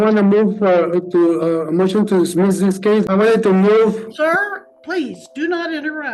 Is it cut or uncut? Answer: cut